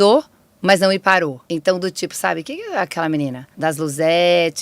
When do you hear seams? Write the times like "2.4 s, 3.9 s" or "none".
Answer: 1.4 s, 3.5 s